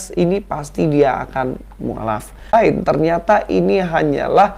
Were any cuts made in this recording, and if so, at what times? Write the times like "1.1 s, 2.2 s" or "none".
2.5 s